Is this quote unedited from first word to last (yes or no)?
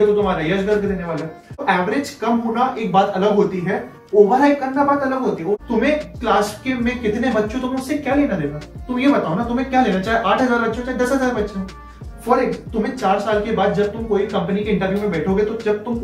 no